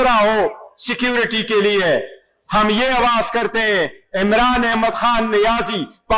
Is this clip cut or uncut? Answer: uncut